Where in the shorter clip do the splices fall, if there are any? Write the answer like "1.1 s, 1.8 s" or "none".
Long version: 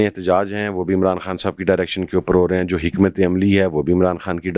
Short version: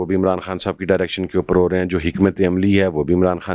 none